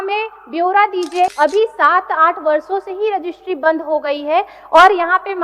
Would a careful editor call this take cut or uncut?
cut